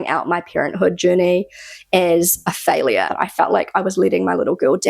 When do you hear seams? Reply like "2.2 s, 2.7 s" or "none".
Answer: 3.2 s